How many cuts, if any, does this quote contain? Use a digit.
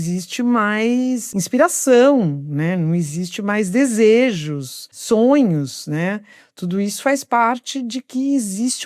2